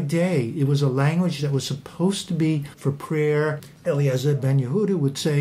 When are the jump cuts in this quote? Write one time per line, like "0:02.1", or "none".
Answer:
0:02.7
0:03.6